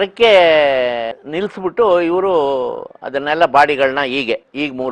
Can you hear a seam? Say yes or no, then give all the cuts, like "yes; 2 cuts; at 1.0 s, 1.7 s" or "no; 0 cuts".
no; 0 cuts